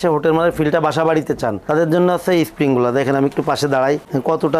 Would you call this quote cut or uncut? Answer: uncut